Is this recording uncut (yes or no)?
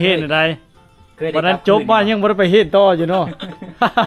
yes